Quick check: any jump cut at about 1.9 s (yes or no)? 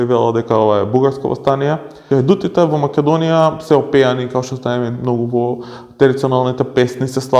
yes